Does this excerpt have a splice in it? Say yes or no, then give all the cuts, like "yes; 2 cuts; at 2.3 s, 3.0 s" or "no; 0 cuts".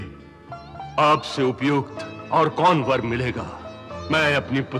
yes; 1 cut; at 3.9 s